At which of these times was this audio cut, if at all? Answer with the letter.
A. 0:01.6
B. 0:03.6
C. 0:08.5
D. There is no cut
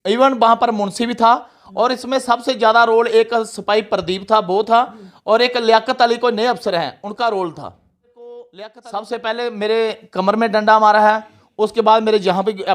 C